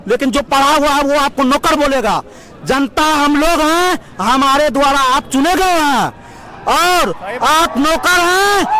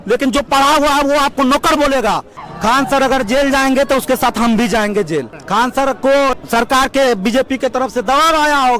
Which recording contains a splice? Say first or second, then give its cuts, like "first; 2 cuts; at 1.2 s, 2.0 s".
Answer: second; 3 cuts; at 2.5 s, 5.4 s, 6.4 s